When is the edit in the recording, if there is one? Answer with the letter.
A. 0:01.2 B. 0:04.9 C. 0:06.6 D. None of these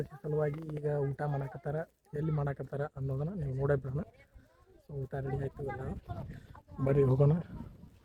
D